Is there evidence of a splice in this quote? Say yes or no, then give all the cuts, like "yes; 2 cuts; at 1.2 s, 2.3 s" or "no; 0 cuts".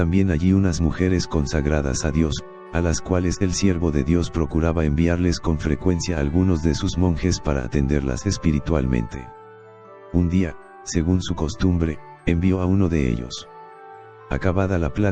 yes; 1 cut; at 8.2 s